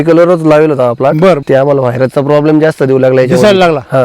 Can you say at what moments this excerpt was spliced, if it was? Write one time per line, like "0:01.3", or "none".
0:01.4

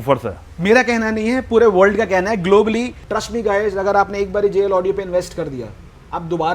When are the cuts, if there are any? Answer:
0:03.0

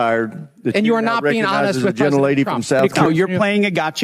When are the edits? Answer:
0:02.8

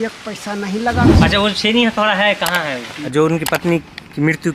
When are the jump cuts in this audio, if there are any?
0:01.1
0:03.0

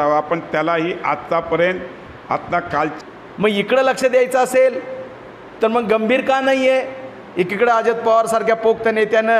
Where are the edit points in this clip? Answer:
0:02.9

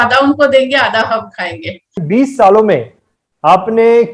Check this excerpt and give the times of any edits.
0:02.0

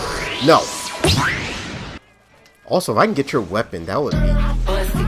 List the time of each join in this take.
0:02.1

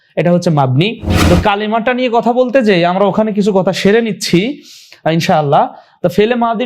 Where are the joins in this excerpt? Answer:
0:01.1

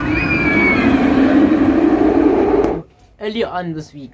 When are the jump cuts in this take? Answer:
0:02.8

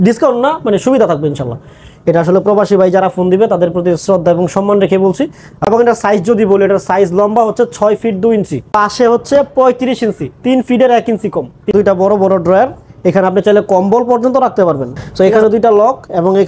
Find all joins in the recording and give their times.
0:05.5
0:08.7
0:11.7
0:15.0

